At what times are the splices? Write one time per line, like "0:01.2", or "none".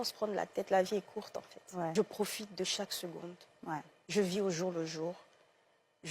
0:01.9